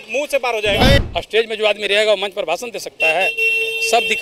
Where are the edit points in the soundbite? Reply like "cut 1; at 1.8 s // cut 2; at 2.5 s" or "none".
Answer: cut 1; at 1.0 s